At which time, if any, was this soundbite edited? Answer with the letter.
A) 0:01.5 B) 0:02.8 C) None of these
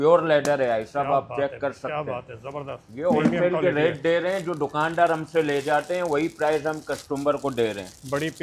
B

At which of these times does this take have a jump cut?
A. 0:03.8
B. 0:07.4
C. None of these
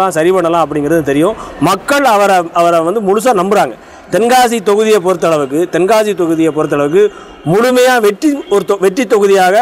C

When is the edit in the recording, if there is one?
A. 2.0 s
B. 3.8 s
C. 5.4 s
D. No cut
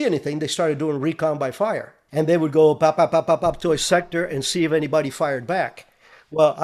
A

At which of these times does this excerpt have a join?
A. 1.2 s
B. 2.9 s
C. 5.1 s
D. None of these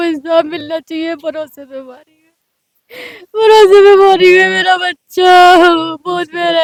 D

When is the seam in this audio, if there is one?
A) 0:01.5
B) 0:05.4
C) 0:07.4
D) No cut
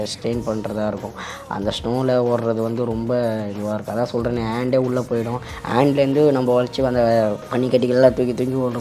C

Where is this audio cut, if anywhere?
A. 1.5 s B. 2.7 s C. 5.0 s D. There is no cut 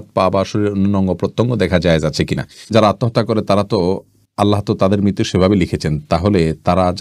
B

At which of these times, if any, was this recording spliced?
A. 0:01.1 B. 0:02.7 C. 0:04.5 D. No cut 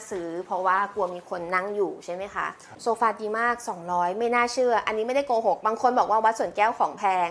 B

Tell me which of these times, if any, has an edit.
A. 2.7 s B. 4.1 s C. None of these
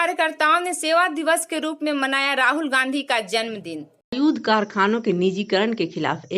B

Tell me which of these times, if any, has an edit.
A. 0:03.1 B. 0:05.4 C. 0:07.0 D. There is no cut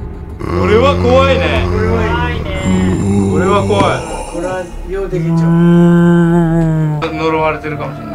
C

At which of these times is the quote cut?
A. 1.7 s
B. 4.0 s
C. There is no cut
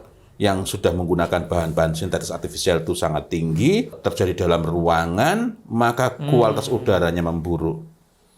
B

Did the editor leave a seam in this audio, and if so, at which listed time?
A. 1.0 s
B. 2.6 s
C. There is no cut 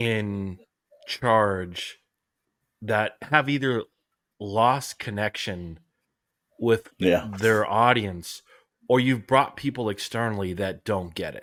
C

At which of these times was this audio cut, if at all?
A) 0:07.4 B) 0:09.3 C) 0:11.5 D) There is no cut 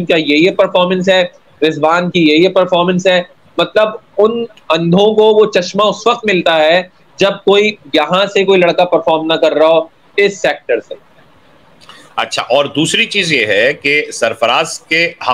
D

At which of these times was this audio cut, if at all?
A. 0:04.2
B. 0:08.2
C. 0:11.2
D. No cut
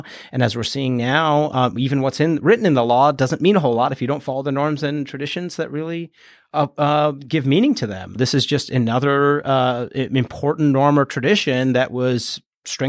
B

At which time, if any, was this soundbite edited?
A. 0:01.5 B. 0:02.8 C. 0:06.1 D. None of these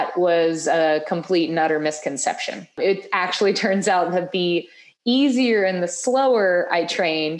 B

